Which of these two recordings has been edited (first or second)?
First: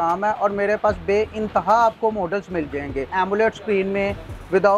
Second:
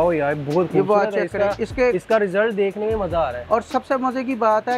first